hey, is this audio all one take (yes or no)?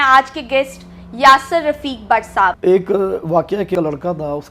no